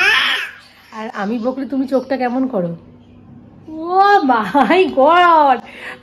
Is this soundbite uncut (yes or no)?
yes